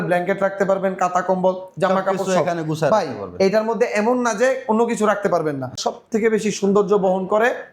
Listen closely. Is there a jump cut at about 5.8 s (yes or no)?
yes